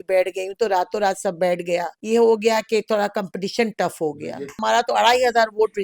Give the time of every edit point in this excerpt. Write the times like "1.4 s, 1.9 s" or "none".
1.9 s, 4.6 s